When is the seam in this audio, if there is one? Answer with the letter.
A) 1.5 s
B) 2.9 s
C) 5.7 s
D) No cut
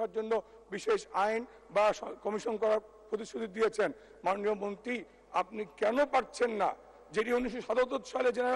D